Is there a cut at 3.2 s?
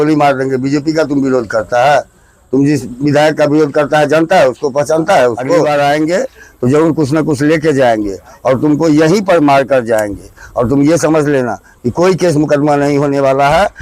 no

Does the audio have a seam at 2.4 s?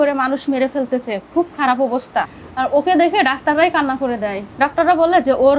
yes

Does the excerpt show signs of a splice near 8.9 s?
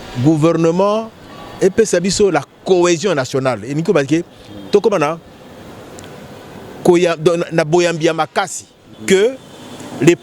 yes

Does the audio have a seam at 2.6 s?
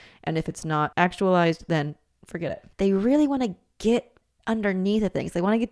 yes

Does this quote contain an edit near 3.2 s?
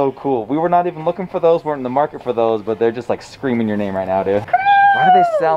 no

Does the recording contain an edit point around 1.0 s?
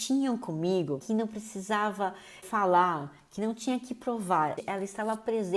yes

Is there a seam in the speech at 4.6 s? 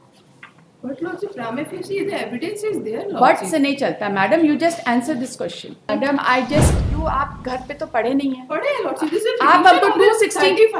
no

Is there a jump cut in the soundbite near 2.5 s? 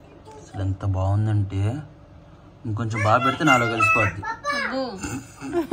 no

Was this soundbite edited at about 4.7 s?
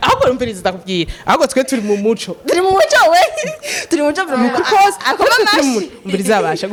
no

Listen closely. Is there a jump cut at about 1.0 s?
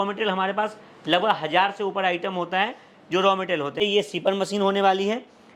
no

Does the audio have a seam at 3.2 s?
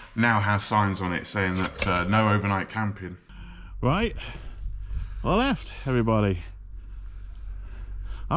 yes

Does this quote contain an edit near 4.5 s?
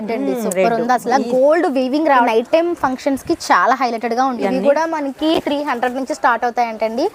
yes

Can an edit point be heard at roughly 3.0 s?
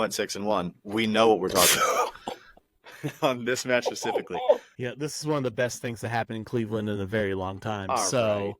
no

